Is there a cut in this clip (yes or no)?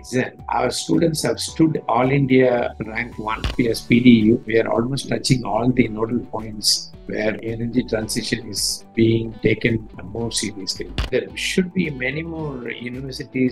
yes